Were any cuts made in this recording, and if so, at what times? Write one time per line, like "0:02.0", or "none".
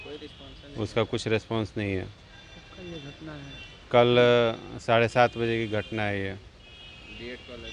none